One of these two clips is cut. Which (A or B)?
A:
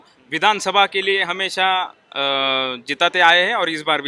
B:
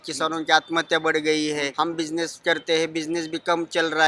B